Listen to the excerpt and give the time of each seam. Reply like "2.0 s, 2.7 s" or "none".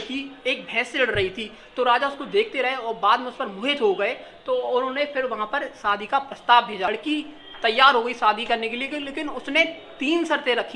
6.9 s